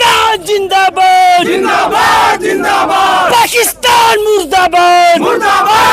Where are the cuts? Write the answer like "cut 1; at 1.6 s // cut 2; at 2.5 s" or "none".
none